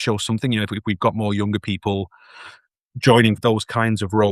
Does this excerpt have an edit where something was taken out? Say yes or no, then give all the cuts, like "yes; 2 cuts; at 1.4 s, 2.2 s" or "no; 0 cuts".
yes; 1 cut; at 3.4 s